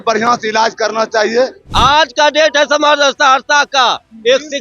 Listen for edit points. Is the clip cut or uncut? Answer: cut